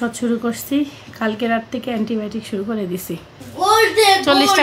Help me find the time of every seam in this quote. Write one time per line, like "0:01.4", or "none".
0:03.4